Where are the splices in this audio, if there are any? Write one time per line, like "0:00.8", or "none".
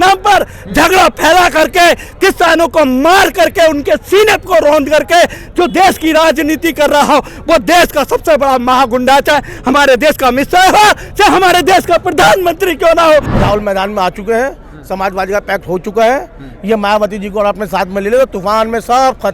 0:13.3